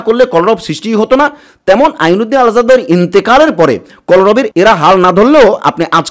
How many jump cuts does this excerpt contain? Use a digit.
0